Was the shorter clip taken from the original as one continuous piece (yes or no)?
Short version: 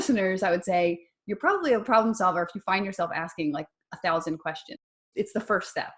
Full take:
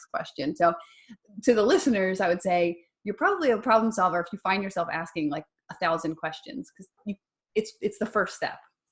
no